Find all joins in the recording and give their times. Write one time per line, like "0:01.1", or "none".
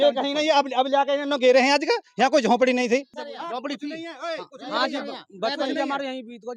0:03.1